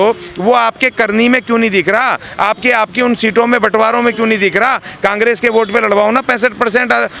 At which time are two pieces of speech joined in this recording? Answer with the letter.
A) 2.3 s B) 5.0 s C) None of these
C